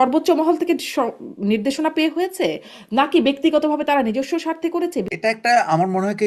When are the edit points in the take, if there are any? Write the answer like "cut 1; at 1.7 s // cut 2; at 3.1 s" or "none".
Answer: cut 1; at 5.1 s